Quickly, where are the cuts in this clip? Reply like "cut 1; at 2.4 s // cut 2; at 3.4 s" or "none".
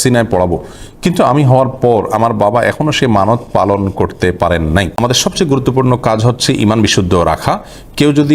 cut 1; at 5.0 s